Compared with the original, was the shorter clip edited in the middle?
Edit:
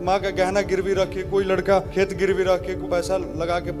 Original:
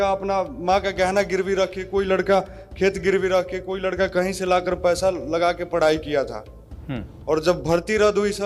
yes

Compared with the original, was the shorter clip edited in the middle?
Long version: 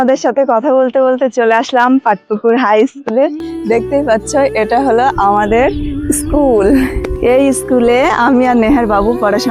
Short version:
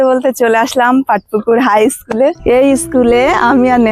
yes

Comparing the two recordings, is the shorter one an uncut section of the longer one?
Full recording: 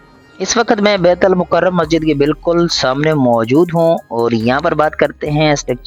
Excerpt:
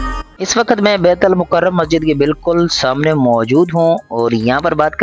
yes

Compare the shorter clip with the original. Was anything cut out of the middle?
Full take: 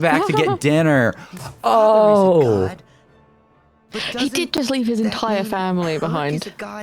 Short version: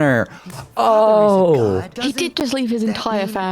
yes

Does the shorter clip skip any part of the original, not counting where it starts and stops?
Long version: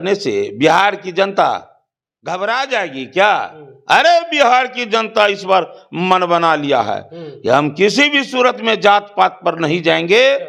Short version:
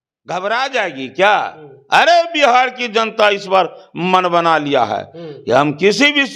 no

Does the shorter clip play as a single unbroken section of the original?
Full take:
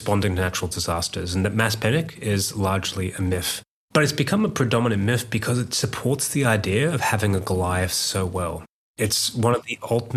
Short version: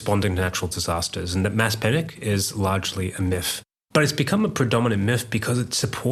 yes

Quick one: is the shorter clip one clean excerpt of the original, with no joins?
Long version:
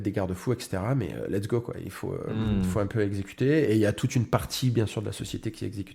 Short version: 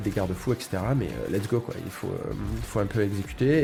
yes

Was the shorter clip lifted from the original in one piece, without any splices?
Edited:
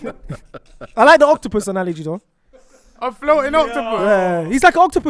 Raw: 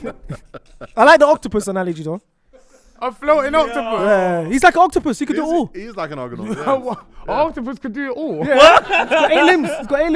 yes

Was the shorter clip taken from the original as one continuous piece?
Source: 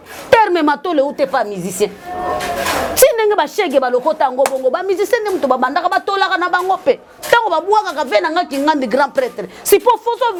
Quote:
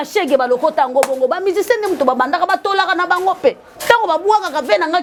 yes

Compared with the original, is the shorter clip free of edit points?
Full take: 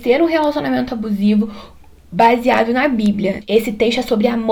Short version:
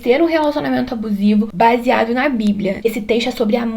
no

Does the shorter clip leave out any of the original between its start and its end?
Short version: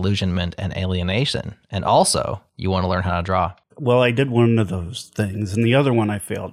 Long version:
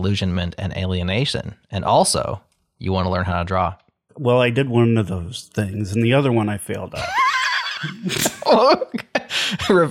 yes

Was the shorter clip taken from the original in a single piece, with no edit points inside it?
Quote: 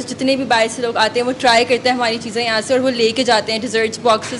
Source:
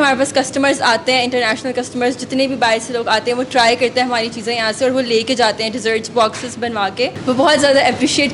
yes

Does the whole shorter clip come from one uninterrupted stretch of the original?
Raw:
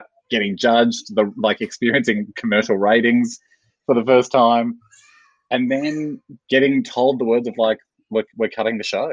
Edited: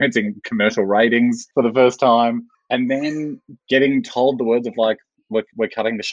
no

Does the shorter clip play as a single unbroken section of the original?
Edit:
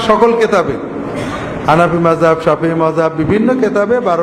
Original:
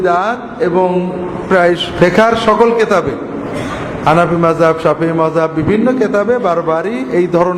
yes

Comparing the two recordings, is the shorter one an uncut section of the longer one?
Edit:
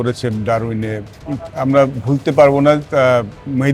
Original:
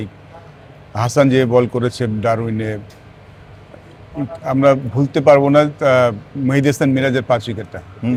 no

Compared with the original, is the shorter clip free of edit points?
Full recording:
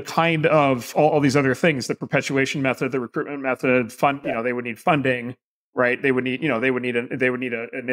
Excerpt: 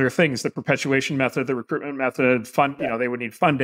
yes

